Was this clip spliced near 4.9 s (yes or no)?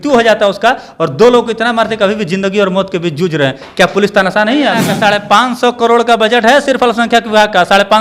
yes